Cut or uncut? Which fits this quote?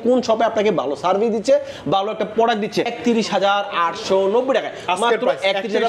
cut